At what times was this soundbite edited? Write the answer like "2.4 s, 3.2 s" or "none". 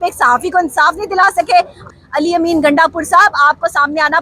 1.9 s